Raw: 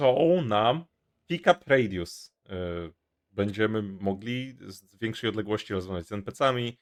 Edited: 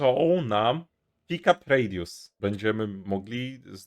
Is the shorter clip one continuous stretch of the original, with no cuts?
no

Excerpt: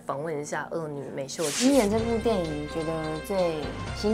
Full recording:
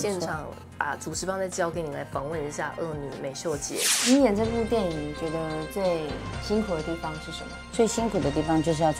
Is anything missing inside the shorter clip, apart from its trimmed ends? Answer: yes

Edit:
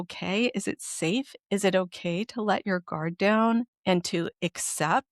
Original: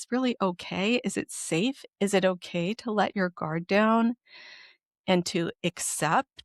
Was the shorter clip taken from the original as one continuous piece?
no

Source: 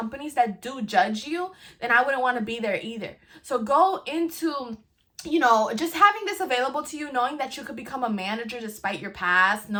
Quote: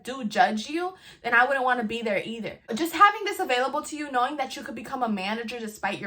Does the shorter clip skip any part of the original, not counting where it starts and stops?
yes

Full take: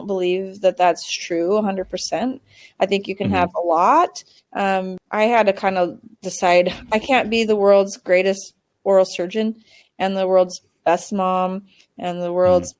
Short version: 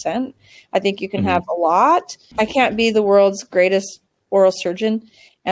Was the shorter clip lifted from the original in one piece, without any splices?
no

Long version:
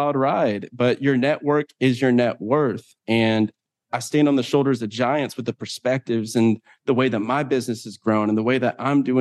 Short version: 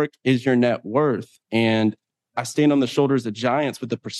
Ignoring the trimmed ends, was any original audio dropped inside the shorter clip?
no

